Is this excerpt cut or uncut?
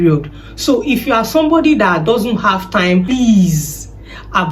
cut